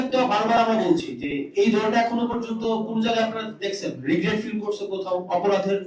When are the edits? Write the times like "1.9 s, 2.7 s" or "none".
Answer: none

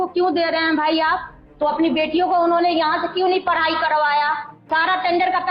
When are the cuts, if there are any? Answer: 1.4 s, 4.5 s

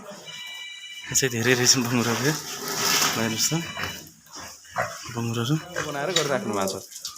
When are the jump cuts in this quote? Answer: 5.9 s

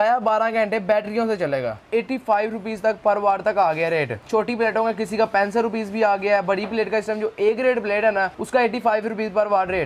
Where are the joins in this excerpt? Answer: 1.8 s, 4.2 s, 8.4 s

